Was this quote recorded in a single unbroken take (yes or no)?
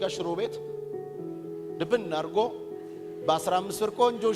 yes